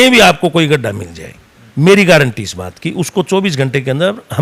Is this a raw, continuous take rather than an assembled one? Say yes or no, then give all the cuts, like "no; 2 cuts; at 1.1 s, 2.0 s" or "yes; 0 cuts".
yes; 0 cuts